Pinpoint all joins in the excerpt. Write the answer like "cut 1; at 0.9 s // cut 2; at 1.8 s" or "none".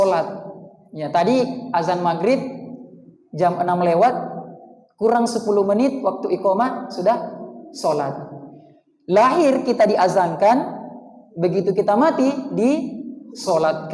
none